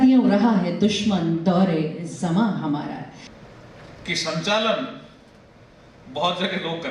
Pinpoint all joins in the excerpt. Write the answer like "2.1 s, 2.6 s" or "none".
3.3 s